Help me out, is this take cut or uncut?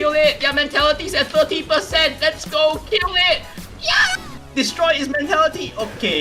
cut